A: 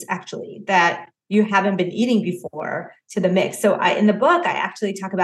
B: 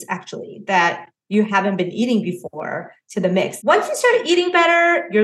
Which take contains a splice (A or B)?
B